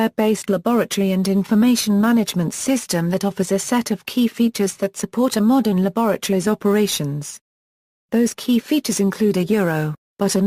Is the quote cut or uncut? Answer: uncut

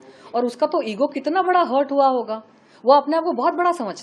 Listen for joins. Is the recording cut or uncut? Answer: uncut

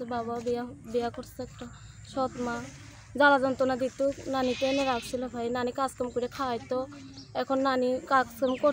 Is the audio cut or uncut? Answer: uncut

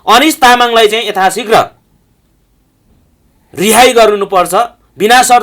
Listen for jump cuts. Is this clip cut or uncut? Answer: uncut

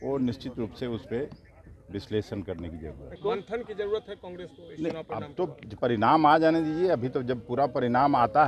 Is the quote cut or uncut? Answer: cut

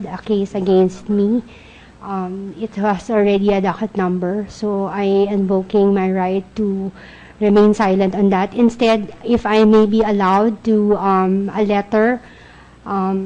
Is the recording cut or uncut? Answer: uncut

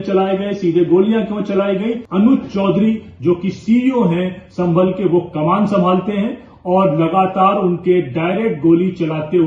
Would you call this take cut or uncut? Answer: cut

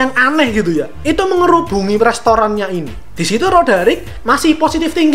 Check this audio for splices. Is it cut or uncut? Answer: uncut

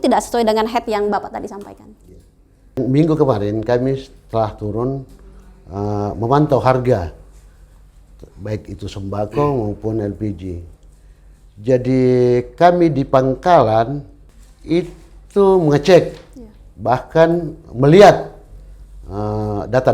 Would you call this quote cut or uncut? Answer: uncut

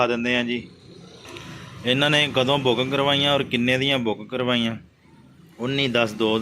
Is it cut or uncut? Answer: uncut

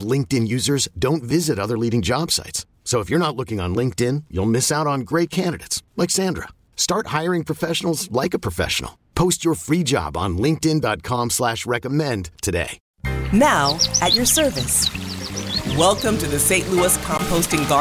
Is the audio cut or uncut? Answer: cut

